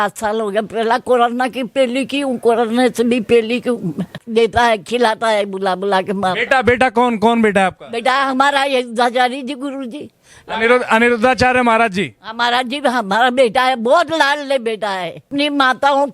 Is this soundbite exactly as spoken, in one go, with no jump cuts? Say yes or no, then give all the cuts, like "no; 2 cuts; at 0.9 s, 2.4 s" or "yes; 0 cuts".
no; 2 cuts; at 4.2 s, 15.3 s